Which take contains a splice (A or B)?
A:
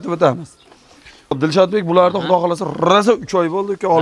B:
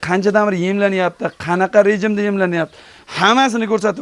A